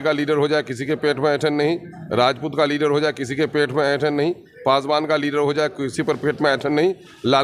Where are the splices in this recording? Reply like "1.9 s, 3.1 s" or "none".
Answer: none